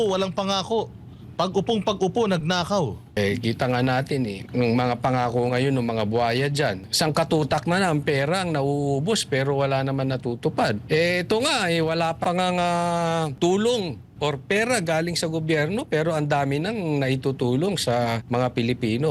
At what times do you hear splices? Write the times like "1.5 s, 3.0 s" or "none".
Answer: 3.2 s, 4.4 s, 6.8 s, 10.8 s, 12.2 s, 13.3 s, 18.2 s